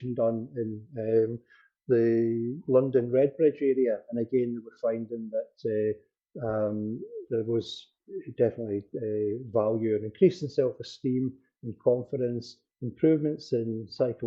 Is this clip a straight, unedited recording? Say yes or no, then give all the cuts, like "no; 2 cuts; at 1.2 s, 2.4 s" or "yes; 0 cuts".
yes; 0 cuts